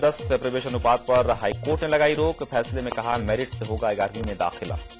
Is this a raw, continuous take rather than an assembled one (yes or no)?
yes